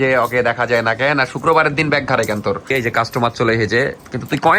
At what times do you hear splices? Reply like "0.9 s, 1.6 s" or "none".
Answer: 2.7 s